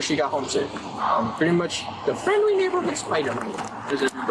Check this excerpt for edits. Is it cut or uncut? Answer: cut